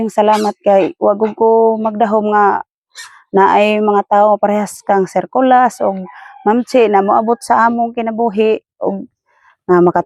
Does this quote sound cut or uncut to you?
uncut